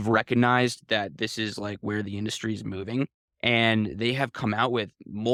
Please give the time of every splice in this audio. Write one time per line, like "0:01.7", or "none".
none